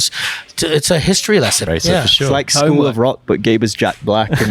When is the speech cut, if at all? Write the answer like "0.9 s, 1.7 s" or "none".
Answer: 1.7 s